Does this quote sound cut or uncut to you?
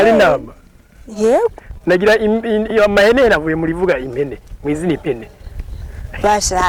uncut